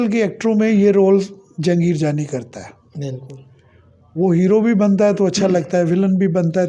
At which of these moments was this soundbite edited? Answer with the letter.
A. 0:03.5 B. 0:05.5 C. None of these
C